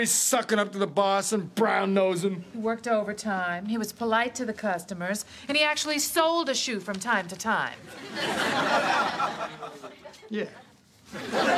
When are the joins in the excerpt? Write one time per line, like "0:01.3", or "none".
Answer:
none